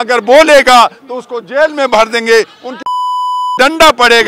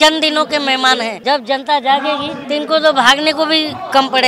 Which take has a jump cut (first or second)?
second